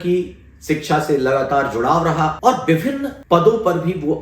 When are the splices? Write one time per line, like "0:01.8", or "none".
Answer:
0:02.4
0:03.1